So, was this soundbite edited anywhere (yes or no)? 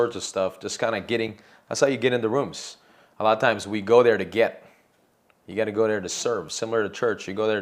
no